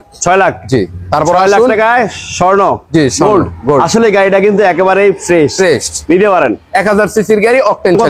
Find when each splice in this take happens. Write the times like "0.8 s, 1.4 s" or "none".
none